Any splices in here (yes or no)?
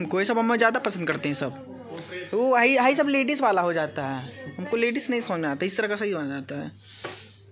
no